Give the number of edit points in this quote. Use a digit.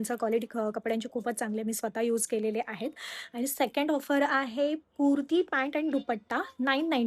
0